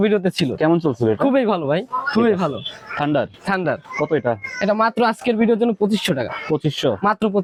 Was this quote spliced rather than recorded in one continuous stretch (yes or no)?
no